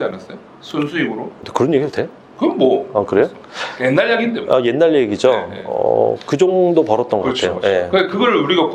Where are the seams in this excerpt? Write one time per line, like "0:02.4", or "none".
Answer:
0:01.4